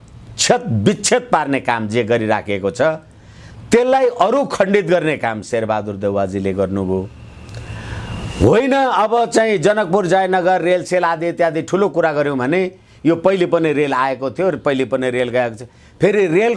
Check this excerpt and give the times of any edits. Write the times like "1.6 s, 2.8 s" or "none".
none